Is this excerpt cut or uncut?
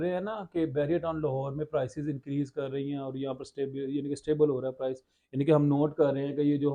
uncut